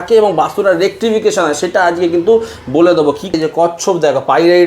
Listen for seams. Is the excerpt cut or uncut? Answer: cut